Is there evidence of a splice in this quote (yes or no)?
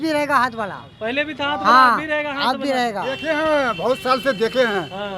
no